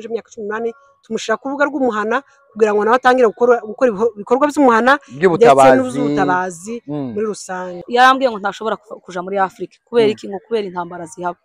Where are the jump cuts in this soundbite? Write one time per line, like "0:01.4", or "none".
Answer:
0:07.8